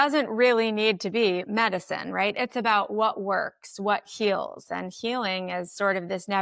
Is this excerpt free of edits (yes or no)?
yes